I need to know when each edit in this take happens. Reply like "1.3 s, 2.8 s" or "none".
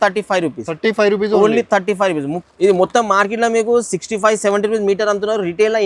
2.4 s

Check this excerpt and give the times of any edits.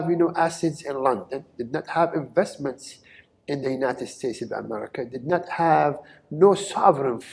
none

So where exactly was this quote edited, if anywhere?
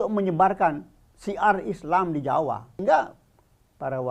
2.7 s

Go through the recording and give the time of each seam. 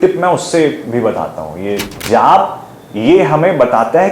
1.9 s

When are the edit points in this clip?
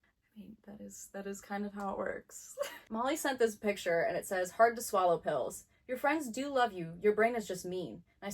2.8 s

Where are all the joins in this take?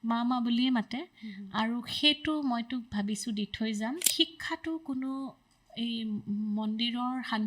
4.1 s

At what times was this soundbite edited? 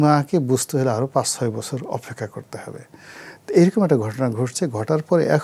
none

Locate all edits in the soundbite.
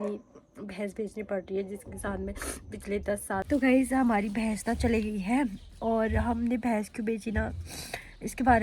3.4 s

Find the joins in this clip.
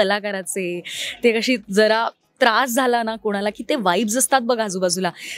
none

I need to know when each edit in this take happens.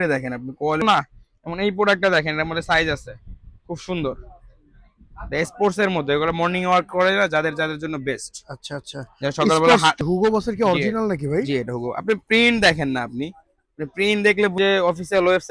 0.8 s, 10.0 s, 14.5 s

